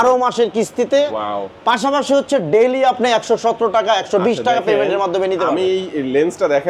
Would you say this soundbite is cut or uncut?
uncut